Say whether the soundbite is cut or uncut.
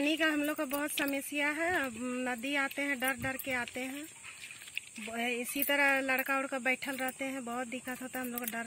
uncut